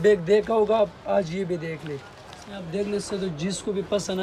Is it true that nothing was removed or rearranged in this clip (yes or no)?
no